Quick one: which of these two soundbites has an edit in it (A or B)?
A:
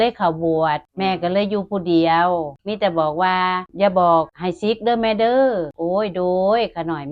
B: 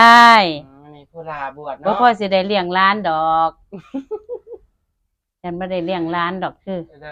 A